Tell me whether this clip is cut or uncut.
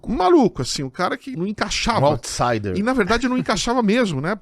cut